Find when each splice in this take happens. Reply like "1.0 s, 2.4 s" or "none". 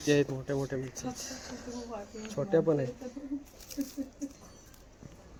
none